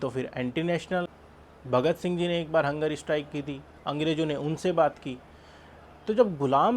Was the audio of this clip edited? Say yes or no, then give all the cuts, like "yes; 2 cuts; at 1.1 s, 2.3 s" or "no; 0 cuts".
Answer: yes; 1 cut; at 1.1 s